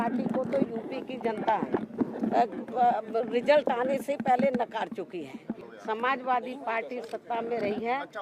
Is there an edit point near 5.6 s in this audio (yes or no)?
yes